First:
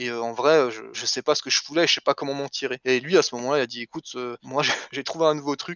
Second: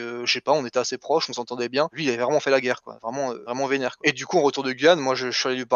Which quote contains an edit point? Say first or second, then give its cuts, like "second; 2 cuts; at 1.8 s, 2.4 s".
second; 2 cuts; at 1.9 s, 3.9 s